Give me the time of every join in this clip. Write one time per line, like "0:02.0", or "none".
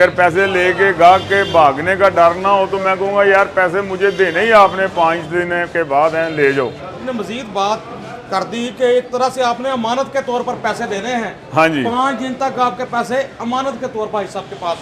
0:07.0